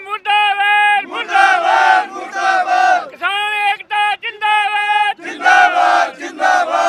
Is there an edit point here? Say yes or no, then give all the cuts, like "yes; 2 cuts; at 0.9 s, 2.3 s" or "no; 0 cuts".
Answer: no; 0 cuts